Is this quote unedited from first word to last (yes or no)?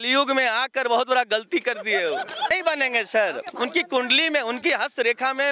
no